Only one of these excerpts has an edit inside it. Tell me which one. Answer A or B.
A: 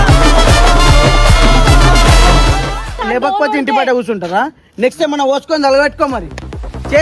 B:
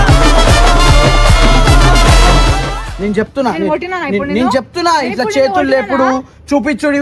A